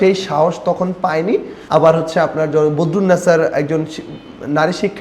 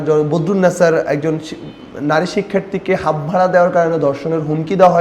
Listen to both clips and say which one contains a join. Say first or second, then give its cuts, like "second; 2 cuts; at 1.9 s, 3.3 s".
first; 1 cut; at 1.5 s